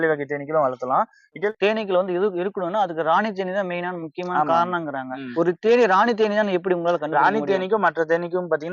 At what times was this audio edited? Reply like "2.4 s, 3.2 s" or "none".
1.4 s, 5.3 s